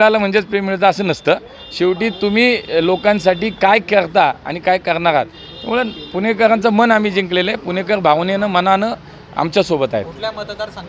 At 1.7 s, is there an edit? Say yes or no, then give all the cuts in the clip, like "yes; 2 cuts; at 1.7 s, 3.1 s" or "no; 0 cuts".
no; 0 cuts